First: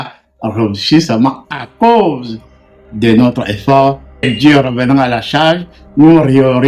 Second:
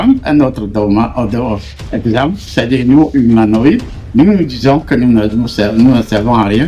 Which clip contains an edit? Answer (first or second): first